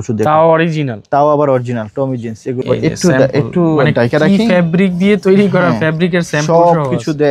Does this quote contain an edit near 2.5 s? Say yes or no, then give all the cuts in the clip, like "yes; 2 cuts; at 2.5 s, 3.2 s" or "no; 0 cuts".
yes; 1 cut; at 2.5 s